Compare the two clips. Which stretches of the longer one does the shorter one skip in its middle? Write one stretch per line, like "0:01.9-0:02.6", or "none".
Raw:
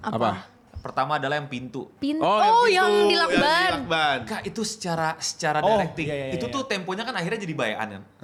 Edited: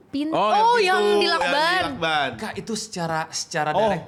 none